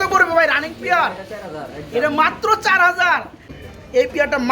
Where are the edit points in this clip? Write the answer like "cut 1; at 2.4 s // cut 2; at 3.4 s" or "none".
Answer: cut 1; at 3.6 s